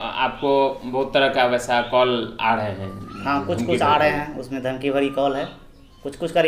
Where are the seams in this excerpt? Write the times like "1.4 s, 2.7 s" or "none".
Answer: none